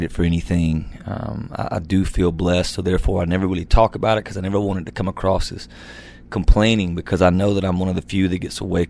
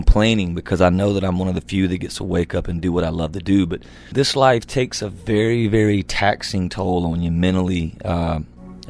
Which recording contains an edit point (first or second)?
second